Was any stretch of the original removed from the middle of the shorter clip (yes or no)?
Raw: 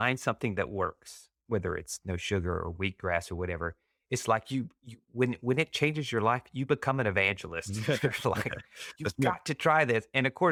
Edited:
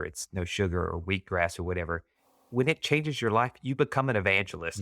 yes